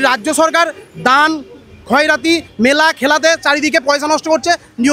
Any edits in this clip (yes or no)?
no